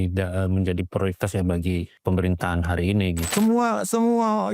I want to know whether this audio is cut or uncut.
cut